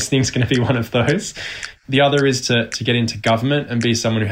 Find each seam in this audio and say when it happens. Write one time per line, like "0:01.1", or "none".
0:01.8